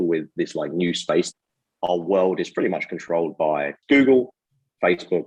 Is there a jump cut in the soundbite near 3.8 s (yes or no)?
yes